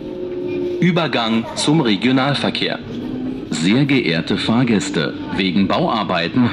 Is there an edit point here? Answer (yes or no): no